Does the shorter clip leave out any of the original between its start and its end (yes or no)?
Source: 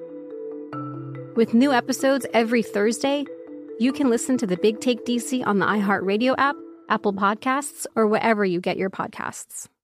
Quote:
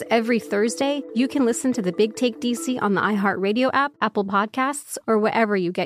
yes